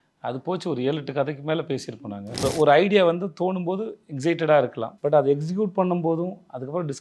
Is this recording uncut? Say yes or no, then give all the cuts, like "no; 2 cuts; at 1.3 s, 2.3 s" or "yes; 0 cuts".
no; 2 cuts; at 2.4 s, 4.9 s